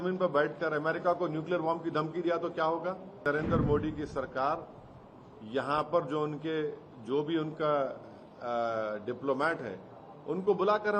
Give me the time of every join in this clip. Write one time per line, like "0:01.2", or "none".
0:03.2